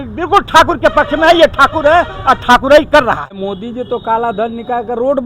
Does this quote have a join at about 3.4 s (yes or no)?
yes